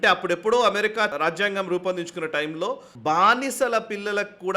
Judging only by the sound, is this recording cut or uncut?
cut